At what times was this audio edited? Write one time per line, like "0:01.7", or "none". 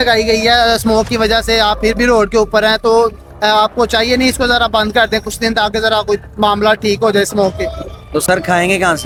none